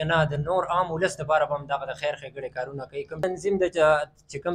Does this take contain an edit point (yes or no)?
yes